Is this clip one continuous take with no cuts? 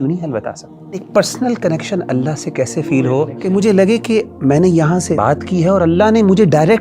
no; 3 cuts; at 1.0 s, 3.4 s, 5.2 s

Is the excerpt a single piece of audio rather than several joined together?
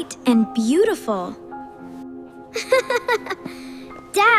no; 2 cuts; at 1.4 s, 2.4 s

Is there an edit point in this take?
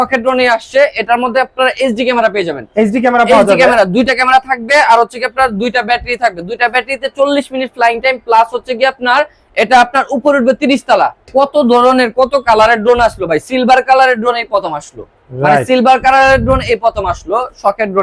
yes; 1 cut; at 11.3 s

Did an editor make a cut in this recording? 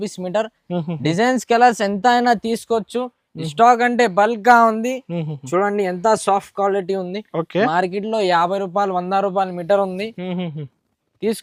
no; 0 cuts

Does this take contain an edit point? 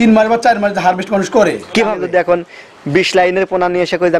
yes; 1 cut; at 2.0 s

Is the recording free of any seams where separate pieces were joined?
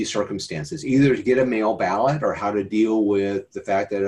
yes; 0 cuts

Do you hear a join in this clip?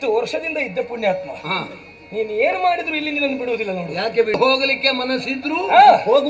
yes; 1 cut; at 4.3 s

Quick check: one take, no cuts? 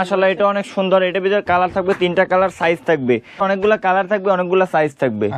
no; 1 cut; at 3.4 s

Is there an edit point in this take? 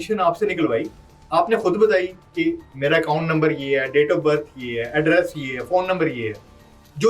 no; 0 cuts

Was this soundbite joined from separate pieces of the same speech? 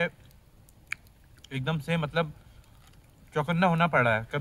no; 0 cuts

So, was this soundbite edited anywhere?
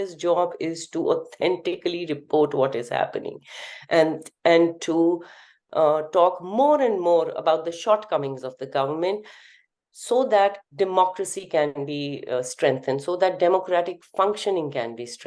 no; 0 cuts

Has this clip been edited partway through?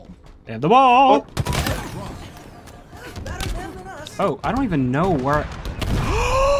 yes; 1 cut; at 1.3 s

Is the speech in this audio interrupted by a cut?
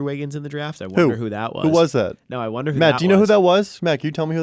no; 0 cuts

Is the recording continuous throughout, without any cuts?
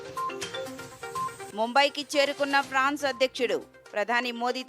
no; 1 cut; at 1.1 s

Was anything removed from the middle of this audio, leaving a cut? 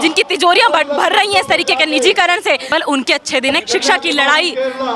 yes; 2 cuts; at 2.7 s, 3.6 s

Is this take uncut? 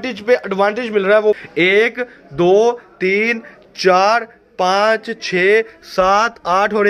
no; 1 cut; at 1.4 s

